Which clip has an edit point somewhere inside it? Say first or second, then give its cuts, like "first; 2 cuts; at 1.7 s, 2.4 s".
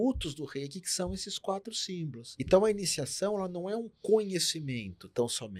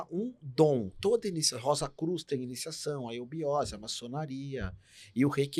first; 1 cut; at 2.2 s